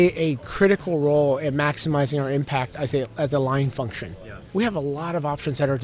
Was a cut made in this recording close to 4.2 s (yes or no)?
yes